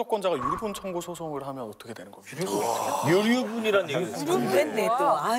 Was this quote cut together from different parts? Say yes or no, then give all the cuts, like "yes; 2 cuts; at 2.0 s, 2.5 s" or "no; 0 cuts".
no; 0 cuts